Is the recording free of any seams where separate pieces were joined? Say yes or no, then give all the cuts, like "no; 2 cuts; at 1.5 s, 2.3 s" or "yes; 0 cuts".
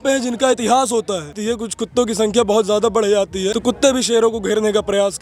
no; 2 cuts; at 1.3 s, 3.5 s